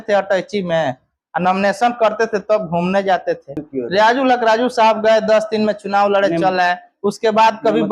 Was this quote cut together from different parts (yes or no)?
yes